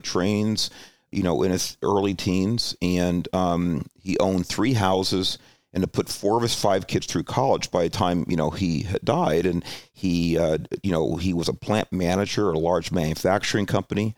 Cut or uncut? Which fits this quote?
cut